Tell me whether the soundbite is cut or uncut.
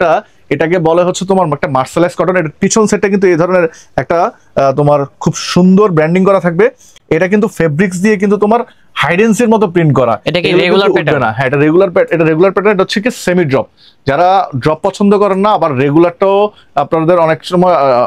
uncut